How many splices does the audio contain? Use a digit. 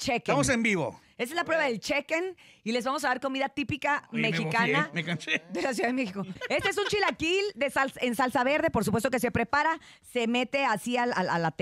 1